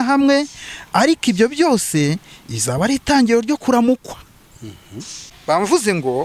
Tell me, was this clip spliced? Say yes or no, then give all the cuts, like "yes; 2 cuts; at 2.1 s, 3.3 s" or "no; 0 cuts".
yes; 1 cut; at 5.3 s